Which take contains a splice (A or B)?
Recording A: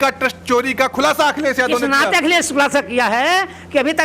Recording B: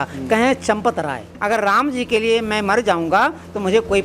B